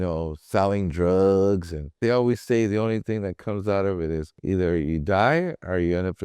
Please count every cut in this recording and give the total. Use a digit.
2